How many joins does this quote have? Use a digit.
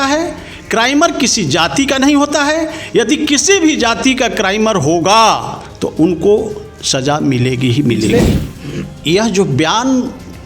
1